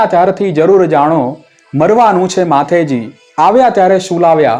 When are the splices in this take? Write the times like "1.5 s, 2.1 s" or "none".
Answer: none

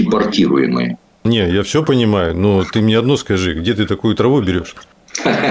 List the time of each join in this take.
1.2 s

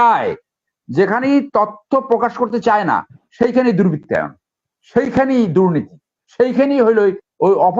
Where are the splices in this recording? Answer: none

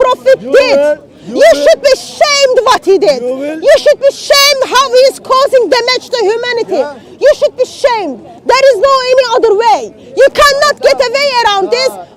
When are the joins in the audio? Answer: none

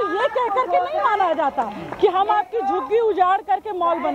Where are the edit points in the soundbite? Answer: none

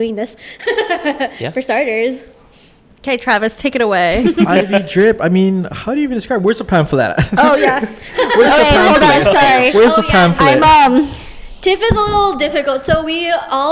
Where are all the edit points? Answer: none

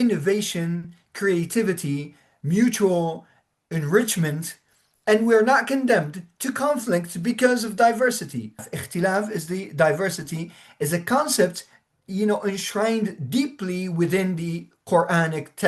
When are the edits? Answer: 8.7 s

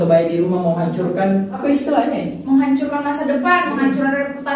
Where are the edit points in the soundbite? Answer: 1.5 s

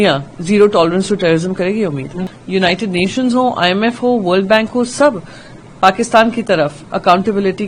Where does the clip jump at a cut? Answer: 2.3 s

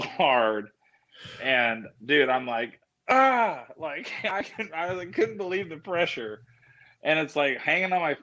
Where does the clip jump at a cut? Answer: none

